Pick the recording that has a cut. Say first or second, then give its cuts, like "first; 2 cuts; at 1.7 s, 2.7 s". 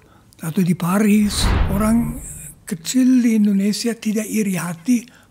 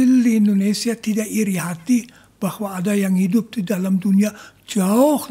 first; 1 cut; at 1.5 s